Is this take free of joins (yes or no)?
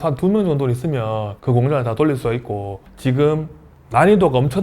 no